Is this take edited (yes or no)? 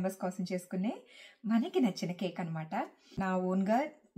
yes